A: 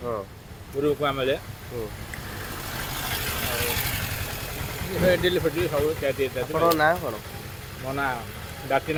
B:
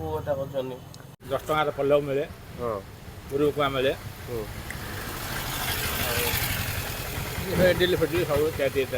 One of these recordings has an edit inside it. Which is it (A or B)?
B